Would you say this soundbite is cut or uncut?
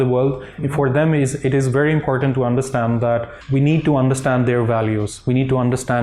cut